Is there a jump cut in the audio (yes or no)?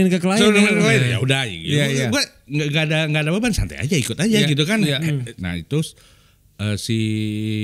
yes